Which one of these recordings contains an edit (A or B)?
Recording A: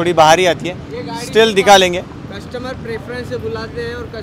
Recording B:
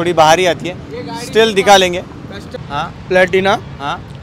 B